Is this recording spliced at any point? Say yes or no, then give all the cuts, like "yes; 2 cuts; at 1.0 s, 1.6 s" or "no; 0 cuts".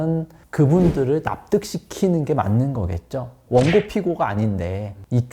yes; 1 cut; at 3.4 s